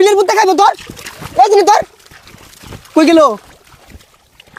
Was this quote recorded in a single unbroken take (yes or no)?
yes